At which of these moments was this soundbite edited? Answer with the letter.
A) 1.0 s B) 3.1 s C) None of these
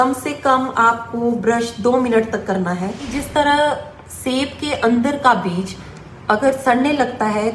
B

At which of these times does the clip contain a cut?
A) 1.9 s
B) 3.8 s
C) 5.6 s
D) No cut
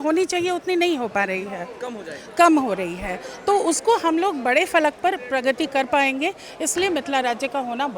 D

